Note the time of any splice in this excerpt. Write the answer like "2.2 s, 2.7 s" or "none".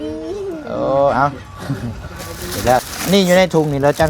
2.8 s